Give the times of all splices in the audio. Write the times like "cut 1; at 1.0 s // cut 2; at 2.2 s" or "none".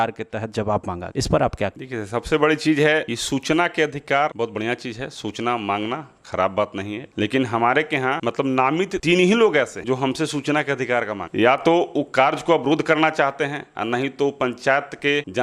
cut 1; at 7.0 s